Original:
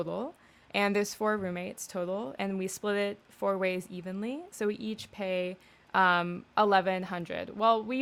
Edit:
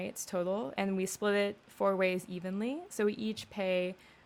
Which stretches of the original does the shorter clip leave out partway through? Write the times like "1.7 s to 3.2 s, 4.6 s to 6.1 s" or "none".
none